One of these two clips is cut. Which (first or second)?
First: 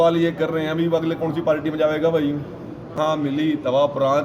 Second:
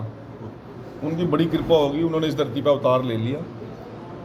first